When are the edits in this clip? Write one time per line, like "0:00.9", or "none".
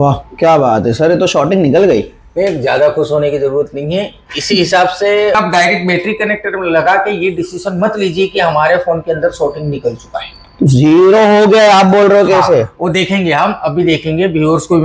0:05.3